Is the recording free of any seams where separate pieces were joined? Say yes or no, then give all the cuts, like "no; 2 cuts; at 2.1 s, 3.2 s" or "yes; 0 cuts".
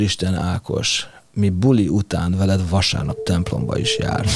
yes; 0 cuts